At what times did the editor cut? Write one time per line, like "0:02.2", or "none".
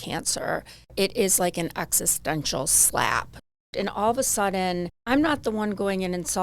0:00.9
0:03.5
0:04.9